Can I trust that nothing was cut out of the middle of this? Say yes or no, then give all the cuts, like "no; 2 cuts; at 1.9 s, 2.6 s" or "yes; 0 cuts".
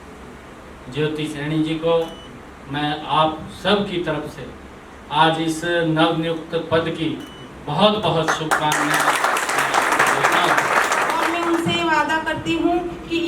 no; 1 cut; at 11.3 s